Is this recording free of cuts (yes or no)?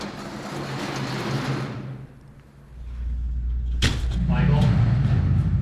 no